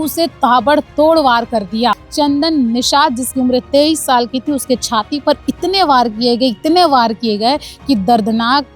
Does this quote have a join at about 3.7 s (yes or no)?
no